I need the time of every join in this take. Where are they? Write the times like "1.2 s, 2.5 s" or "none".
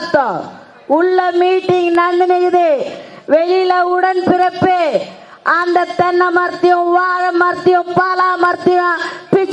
none